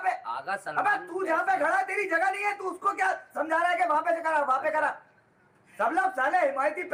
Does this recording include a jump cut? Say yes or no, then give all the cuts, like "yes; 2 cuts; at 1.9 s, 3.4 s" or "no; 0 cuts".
no; 0 cuts